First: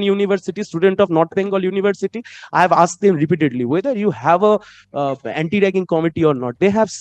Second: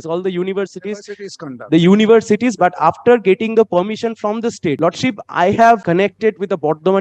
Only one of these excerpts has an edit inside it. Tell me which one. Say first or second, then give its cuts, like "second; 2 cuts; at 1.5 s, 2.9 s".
second; 2 cuts; at 4.8 s, 5.8 s